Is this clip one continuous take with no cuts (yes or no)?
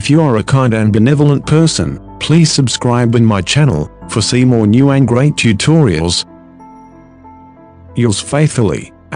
yes